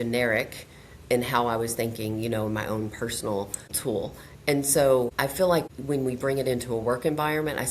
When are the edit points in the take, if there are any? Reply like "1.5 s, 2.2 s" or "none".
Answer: 3.7 s, 5.6 s